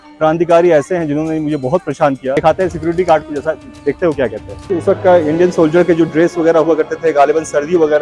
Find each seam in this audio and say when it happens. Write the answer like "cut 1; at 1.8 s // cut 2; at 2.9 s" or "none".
cut 1; at 2.4 s // cut 2; at 4.7 s